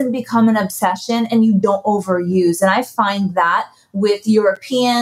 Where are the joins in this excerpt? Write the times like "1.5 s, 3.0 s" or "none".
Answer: 1.6 s